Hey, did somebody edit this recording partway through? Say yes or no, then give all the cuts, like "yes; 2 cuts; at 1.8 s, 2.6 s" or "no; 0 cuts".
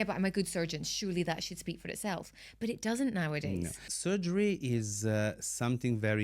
yes; 1 cut; at 3.9 s